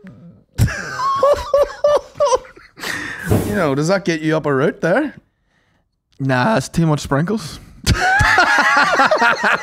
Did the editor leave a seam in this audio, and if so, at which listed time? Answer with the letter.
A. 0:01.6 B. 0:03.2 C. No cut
B